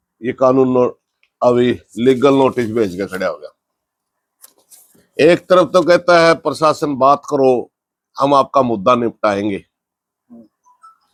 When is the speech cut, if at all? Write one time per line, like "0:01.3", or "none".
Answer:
none

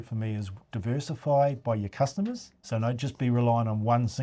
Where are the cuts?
0:02.5

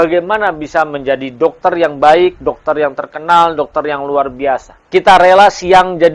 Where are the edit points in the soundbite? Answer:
0:04.7

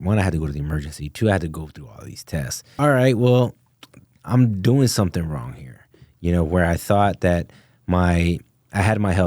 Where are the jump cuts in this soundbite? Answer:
0:02.7

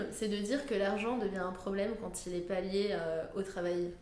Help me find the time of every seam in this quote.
none

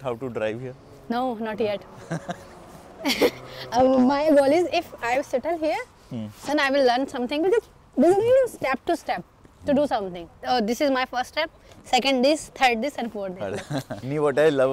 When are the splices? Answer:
none

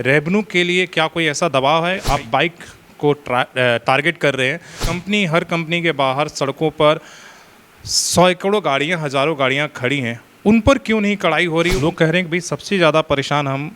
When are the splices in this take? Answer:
0:02.0
0:04.9
0:11.8

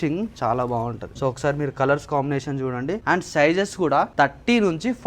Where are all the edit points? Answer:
0:01.1
0:03.0
0:04.1

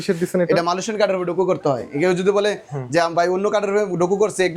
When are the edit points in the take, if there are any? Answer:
none

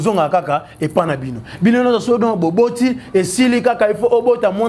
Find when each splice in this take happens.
none

